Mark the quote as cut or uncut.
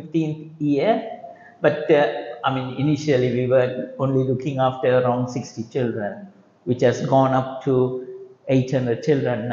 uncut